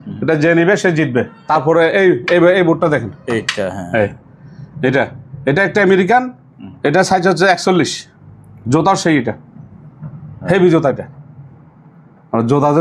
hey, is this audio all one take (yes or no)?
no